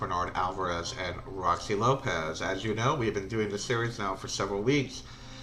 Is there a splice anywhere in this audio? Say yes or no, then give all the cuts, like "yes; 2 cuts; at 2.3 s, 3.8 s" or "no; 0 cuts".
yes; 1 cut; at 1.4 s